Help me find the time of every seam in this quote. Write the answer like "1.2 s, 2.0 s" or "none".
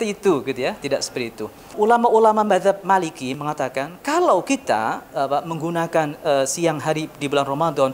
1.7 s